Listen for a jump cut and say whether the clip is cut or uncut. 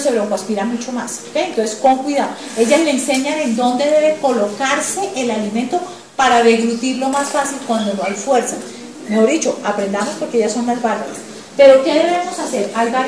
cut